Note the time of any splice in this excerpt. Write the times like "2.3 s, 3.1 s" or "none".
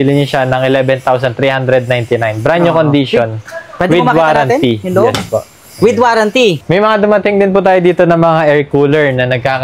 6.6 s